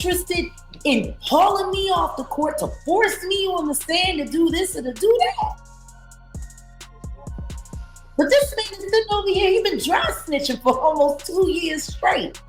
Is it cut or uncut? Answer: cut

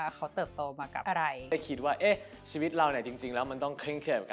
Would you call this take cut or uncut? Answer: cut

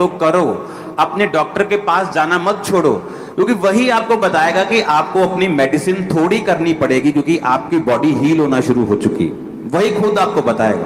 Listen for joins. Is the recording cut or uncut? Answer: uncut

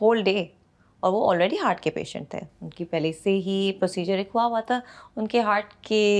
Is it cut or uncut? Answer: uncut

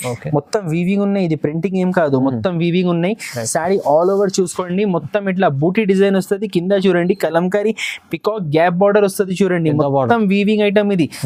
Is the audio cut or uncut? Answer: uncut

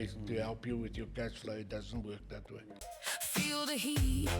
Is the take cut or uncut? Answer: cut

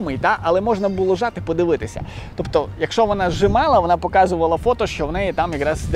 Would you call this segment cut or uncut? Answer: uncut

